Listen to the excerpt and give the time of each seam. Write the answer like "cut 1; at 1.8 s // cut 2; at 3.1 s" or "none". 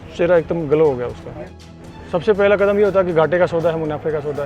cut 1; at 1.6 s